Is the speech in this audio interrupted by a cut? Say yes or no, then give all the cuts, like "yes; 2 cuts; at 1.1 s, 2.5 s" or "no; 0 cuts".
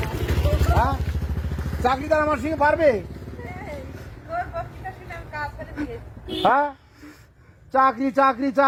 no; 0 cuts